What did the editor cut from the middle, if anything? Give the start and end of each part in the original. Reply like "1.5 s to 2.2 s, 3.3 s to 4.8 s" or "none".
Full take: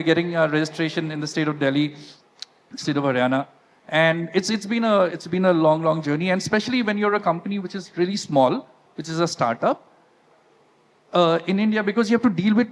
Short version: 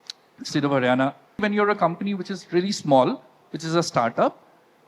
3.7 s to 6.8 s

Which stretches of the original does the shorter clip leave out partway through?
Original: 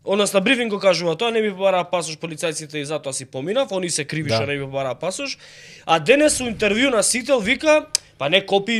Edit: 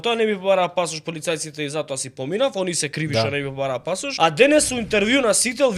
5.2 s to 5.8 s

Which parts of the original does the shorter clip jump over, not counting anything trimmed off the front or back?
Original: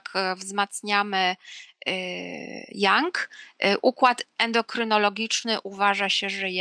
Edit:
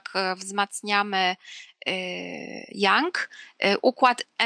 none

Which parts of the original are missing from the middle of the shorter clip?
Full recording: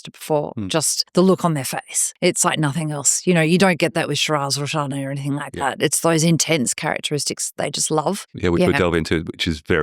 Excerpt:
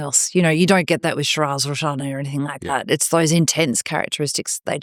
none

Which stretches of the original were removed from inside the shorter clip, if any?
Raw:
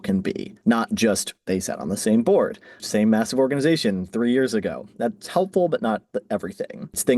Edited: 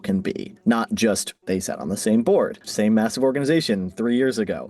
2.6 s to 2.8 s

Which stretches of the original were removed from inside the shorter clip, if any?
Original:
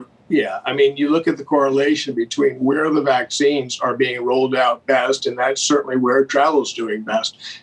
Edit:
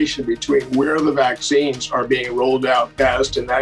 none

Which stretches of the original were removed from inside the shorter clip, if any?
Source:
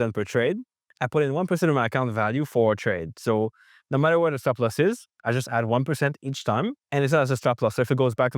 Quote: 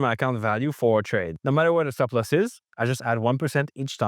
3.1 s to 3.8 s

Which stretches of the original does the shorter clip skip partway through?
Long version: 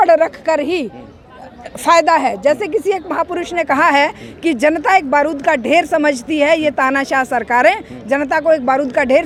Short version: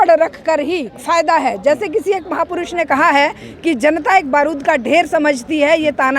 0.9 s to 1.7 s

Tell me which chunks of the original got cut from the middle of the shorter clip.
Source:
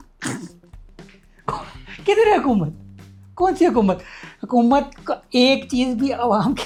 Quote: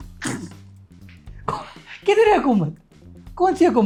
none

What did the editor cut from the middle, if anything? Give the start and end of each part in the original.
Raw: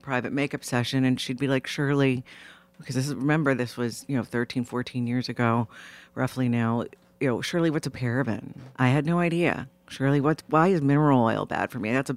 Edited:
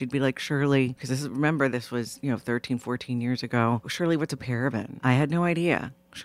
2.3 s to 2.9 s, 5.8 s to 7.4 s, 8.5 s to 8.7 s

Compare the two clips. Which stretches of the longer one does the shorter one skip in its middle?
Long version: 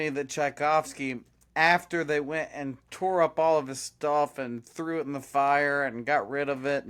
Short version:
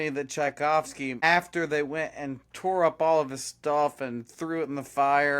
1.2 s to 1.5 s

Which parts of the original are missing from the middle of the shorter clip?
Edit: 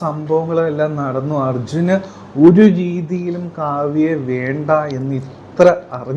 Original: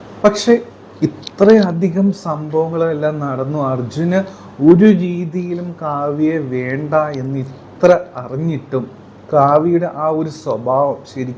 none

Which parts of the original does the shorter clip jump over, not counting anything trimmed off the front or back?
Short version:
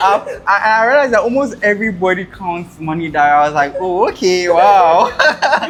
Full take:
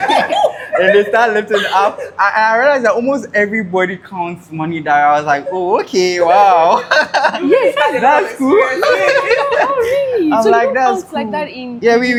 none

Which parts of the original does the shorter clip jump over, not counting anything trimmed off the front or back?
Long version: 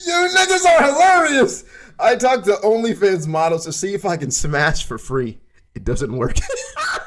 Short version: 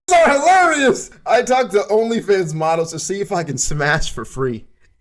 1.6 s to 1.8 s

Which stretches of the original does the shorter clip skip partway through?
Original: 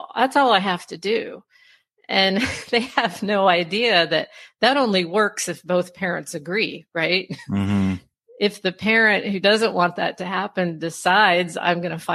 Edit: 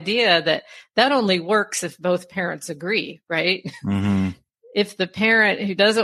none

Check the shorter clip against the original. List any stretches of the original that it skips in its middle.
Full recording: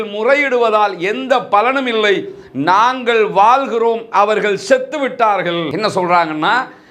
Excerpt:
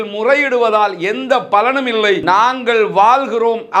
2.2 s to 2.6 s

